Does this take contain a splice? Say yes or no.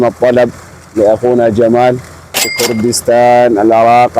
yes